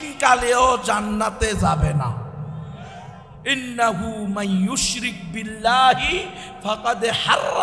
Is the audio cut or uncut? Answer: uncut